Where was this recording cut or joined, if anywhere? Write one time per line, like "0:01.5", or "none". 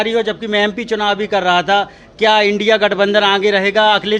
none